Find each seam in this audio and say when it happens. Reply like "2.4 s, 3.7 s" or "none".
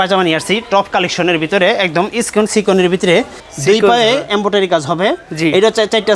3.4 s